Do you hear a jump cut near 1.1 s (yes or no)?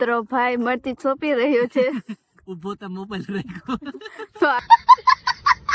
no